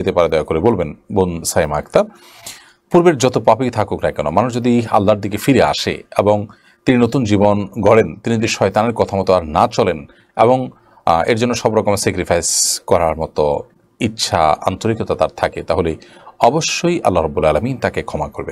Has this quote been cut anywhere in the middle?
no; 0 cuts

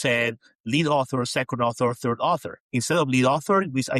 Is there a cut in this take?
yes; 1 cut; at 2.6 s

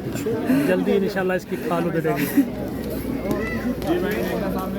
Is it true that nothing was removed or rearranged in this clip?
no; 1 cut; at 2.5 s

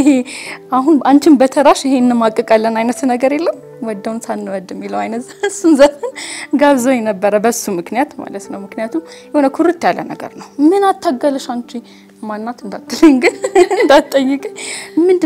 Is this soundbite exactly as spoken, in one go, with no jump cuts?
yes; 0 cuts

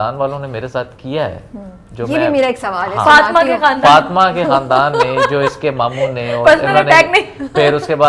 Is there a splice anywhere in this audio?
no; 0 cuts

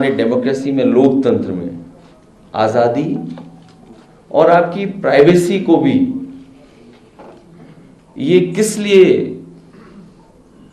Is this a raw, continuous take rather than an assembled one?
yes; 0 cuts

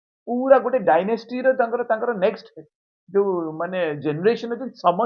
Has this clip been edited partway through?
no; 0 cuts

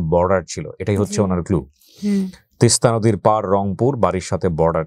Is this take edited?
no; 0 cuts

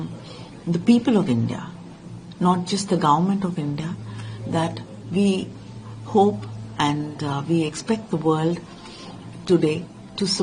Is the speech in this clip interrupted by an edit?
no; 0 cuts

